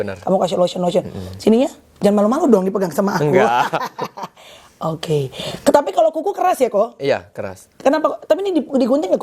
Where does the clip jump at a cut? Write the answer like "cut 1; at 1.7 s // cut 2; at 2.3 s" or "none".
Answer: none